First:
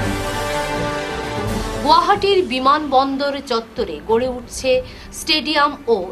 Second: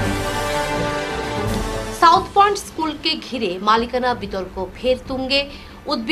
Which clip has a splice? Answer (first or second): second